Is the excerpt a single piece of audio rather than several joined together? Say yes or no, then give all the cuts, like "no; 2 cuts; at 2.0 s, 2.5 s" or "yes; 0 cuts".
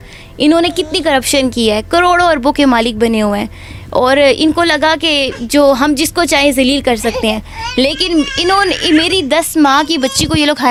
yes; 0 cuts